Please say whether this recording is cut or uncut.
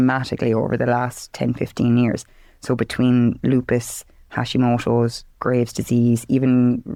uncut